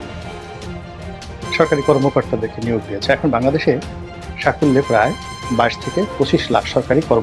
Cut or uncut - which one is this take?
uncut